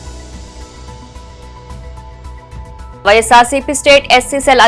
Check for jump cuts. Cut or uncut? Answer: uncut